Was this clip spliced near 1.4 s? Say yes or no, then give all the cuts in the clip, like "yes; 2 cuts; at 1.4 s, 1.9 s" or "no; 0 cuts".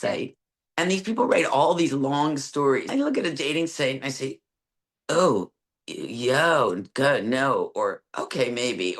no; 1 cut; at 2.9 s